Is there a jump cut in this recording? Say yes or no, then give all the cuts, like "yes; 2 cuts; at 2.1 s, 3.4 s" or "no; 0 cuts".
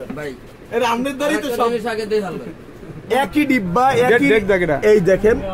yes; 1 cut; at 3.0 s